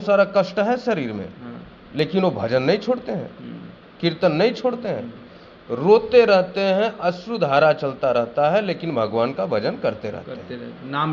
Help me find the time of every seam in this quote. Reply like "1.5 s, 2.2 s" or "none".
none